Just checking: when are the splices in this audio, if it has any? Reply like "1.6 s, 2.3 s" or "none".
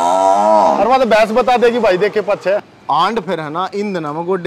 2.7 s